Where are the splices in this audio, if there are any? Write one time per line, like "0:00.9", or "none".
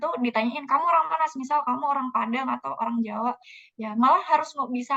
none

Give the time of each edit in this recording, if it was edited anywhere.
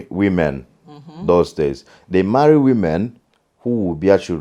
none

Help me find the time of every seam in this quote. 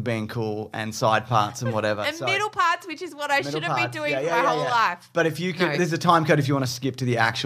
none

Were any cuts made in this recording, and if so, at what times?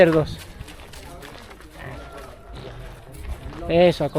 none

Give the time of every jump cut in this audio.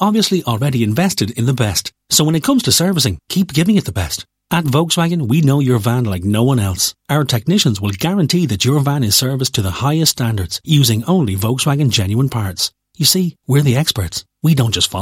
none

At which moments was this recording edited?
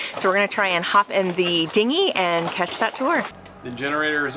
0:03.4

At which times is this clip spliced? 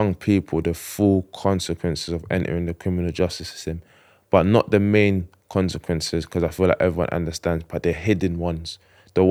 none

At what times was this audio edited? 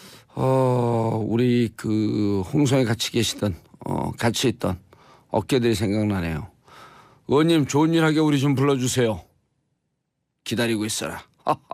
0:05.1

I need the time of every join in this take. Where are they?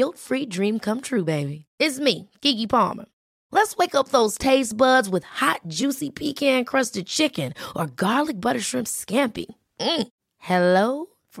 none

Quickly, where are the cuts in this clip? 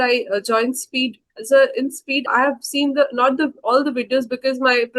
0:01.3
0:02.3

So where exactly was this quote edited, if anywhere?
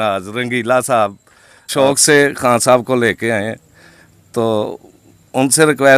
0:01.7

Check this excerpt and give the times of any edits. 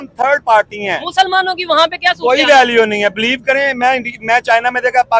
none

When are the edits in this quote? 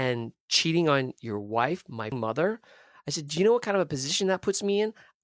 0:02.2

